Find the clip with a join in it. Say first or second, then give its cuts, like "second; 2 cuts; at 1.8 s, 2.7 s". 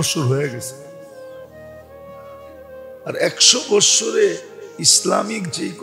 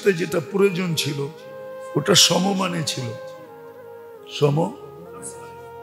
first; 2 cuts; at 0.9 s, 2.9 s